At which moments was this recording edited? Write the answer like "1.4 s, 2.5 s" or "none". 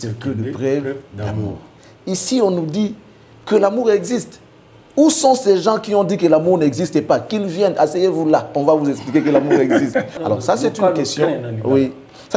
10.1 s